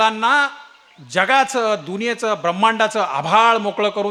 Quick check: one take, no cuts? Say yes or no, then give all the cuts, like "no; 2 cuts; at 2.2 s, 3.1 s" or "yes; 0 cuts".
yes; 0 cuts